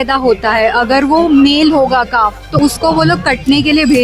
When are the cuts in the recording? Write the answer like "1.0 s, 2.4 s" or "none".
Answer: 2.6 s